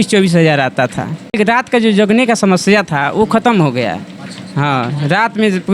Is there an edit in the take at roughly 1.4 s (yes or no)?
yes